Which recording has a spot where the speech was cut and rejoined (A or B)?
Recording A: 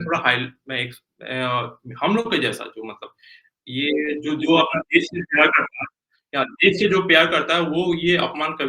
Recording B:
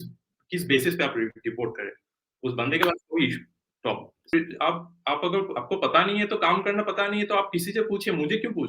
B